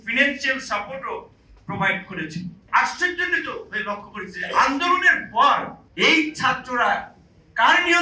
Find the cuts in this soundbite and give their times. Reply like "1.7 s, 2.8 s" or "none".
2.6 s, 5.8 s